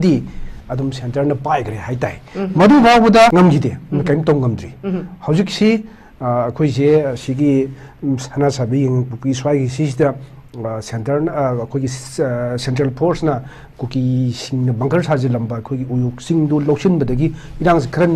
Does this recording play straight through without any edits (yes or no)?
no